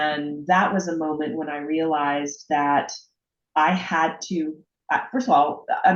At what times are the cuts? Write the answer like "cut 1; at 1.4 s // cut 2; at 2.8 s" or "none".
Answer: none